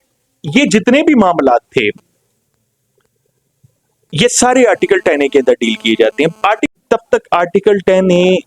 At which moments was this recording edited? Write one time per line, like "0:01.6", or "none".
0:06.7